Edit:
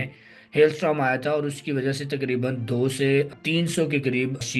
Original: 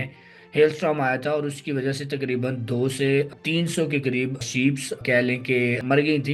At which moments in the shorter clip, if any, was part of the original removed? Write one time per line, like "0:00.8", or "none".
none